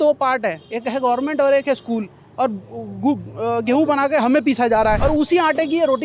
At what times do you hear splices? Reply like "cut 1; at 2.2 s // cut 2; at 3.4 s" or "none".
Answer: cut 1; at 5.0 s